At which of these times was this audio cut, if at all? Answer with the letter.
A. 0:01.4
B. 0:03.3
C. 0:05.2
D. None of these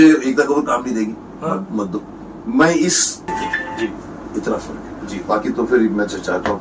B